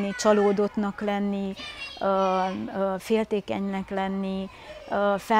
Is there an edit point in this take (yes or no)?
no